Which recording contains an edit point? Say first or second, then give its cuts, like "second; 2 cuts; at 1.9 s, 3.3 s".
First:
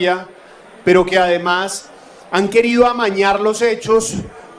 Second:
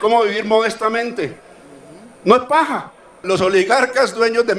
second; 1 cut; at 3.2 s